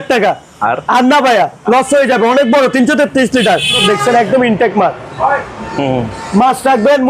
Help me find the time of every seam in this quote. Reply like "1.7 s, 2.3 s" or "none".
3.8 s